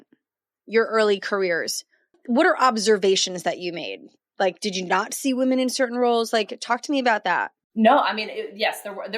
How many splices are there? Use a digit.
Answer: 2